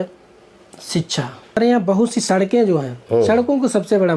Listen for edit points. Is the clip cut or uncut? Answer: cut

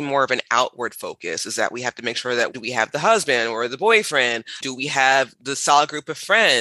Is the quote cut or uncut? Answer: cut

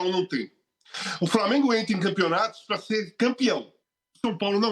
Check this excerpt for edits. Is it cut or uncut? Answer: uncut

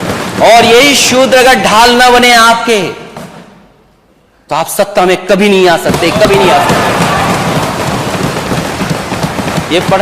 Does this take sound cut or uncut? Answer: uncut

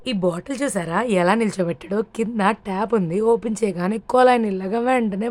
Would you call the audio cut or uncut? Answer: uncut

